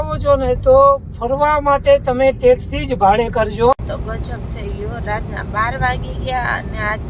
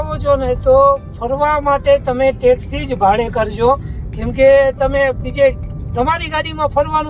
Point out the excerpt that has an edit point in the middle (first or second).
first